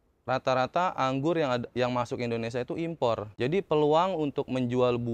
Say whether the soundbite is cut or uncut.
cut